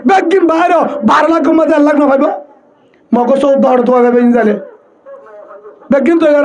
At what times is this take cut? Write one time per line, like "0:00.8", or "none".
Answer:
none